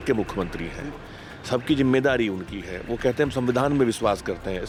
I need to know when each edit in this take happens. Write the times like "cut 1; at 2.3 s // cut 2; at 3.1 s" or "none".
none